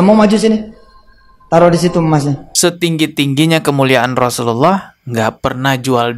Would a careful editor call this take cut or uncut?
cut